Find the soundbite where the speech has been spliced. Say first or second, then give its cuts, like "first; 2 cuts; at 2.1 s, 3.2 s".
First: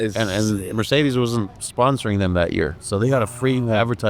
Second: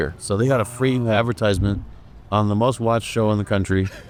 first; 1 cut; at 1.6 s